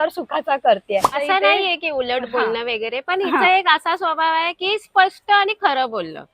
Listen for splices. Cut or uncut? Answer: cut